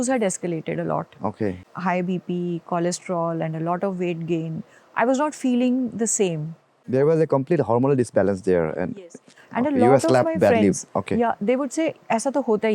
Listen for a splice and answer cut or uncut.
cut